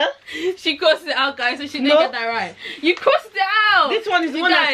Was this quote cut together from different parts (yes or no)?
no